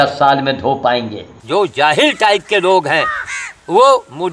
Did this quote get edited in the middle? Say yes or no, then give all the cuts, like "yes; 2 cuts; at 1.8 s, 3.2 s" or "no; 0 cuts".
yes; 1 cut; at 1.3 s